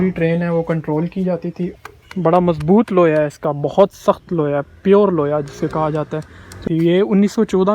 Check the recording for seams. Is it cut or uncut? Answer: cut